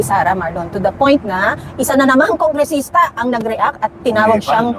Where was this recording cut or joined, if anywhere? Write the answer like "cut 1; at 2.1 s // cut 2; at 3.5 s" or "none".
none